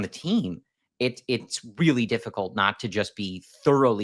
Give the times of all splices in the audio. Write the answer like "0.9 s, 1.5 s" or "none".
none